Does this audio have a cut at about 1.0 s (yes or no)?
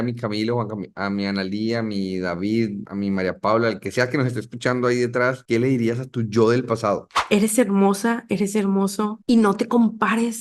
no